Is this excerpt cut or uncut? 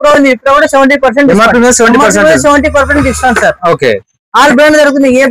uncut